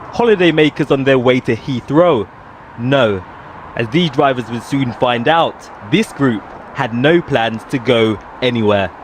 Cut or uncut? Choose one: uncut